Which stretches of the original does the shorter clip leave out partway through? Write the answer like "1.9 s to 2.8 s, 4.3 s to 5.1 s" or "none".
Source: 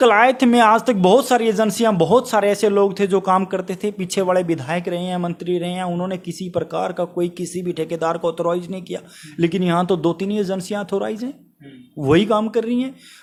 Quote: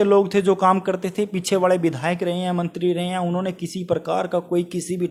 none